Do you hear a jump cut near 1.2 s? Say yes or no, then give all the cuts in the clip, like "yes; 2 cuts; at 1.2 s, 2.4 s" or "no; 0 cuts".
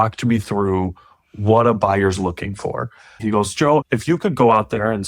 no; 1 cut; at 3.1 s